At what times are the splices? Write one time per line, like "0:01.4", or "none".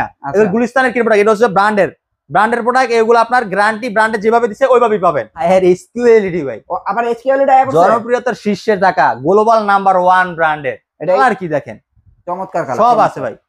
0:05.4
0:11.2

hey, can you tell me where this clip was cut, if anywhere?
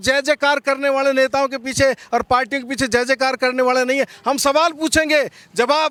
none

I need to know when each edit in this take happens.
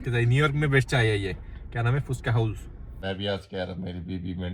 0:03.0

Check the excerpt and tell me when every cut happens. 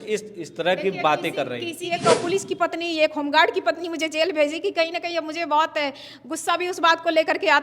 0:01.7

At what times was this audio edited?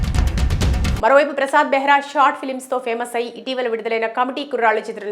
0:01.0

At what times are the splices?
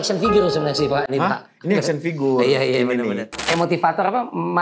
0:03.4

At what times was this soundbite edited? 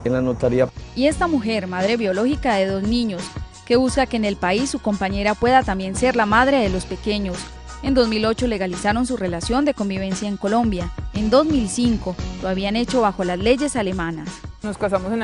0:13.0

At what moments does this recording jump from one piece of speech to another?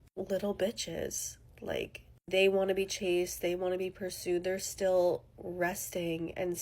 0:02.1

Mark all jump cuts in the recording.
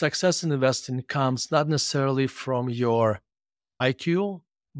0:03.8

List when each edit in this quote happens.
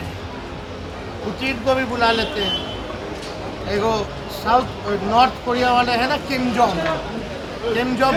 none

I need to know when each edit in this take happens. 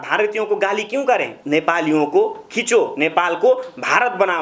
0:01.3

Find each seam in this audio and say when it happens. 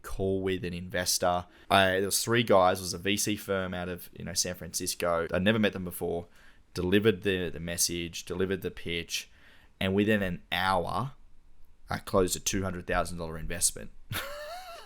0:01.5
0:05.3

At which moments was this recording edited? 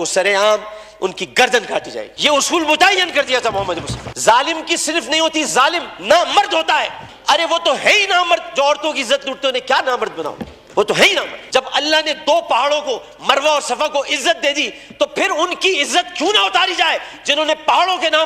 0:04.1
0:07.0
0:11.4

